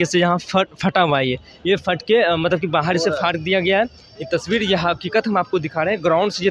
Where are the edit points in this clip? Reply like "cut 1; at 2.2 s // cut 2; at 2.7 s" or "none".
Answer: none